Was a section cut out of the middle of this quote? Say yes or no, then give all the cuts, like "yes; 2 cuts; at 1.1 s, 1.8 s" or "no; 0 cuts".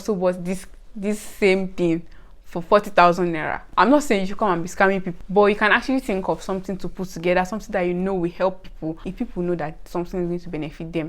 yes; 3 cuts; at 3.6 s, 5.1 s, 9.0 s